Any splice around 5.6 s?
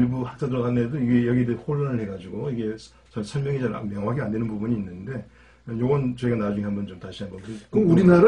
no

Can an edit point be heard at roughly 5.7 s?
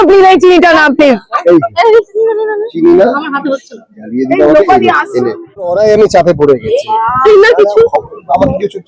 yes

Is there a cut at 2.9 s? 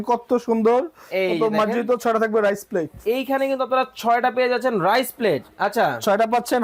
no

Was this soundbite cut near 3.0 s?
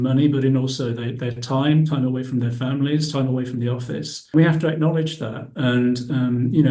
no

